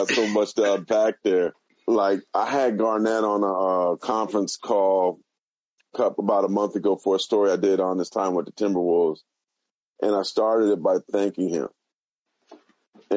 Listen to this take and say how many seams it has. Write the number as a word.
one